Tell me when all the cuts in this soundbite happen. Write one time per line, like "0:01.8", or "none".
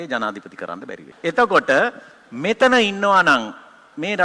0:01.0